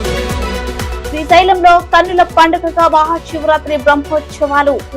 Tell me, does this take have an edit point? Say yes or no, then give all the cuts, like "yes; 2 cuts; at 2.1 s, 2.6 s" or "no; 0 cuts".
yes; 1 cut; at 0.9 s